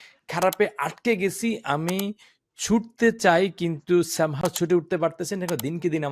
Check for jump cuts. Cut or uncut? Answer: uncut